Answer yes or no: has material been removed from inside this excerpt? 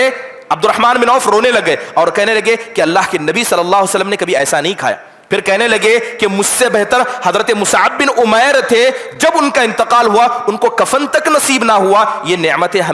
no